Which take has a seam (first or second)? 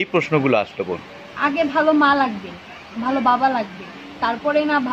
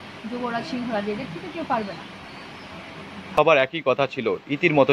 second